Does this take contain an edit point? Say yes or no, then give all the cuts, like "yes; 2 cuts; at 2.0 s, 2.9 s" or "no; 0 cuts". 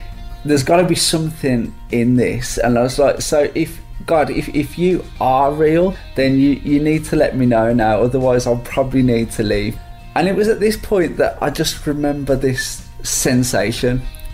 yes; 2 cuts; at 6.0 s, 9.7 s